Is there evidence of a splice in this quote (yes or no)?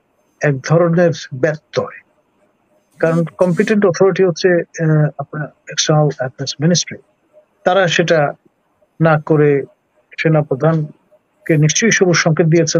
no